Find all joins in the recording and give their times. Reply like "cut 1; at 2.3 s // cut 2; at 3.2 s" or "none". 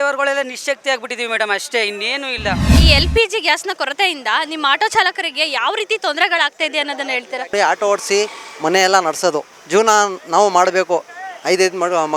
cut 1; at 2.7 s // cut 2; at 7.5 s // cut 3; at 9.6 s

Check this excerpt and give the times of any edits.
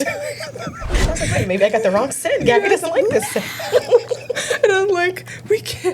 cut 1; at 0.9 s

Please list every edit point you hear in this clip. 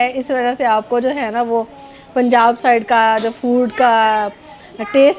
none

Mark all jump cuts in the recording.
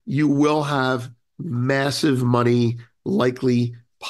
none

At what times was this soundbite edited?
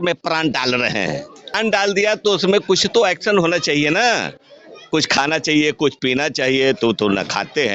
cut 1; at 1.3 s

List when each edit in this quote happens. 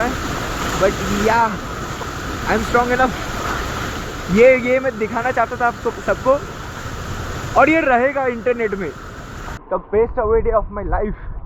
cut 1; at 9.6 s

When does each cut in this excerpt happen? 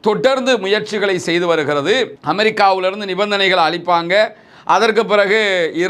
none

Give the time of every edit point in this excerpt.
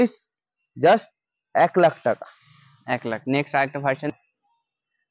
cut 1; at 4.1 s

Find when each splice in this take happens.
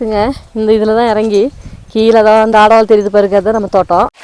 none

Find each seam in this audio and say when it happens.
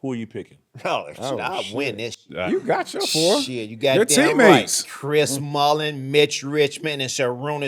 cut 1; at 2.5 s

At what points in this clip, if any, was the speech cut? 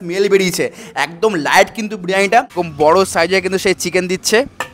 cut 1; at 2.5 s

